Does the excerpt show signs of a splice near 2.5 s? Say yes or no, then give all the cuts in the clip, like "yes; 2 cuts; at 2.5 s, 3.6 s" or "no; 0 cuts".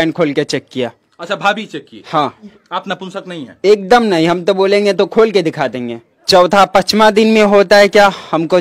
yes; 2 cuts; at 2.5 s, 6.2 s